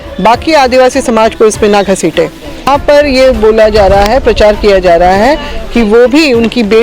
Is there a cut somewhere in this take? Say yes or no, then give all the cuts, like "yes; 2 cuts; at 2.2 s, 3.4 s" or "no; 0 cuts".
yes; 1 cut; at 2.6 s